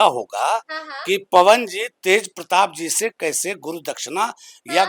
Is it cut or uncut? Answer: uncut